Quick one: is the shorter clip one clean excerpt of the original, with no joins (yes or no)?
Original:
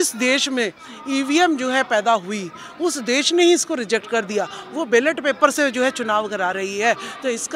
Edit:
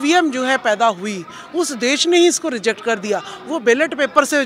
yes